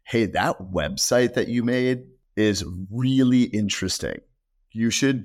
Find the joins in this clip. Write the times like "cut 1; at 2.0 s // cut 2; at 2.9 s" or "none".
cut 1; at 2.2 s

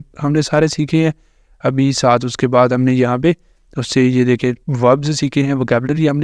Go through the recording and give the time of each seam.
cut 1; at 4.7 s

